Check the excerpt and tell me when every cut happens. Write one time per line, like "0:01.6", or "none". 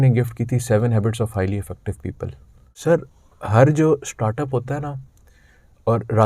0:02.7